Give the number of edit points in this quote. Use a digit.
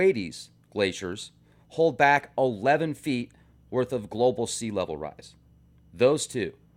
1